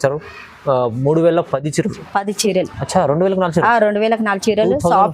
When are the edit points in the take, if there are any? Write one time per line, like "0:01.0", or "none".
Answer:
0:02.4